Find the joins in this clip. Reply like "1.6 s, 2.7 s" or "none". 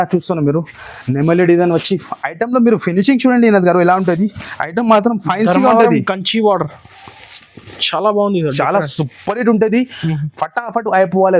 none